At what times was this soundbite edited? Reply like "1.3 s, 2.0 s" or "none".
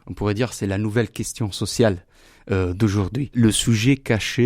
3.3 s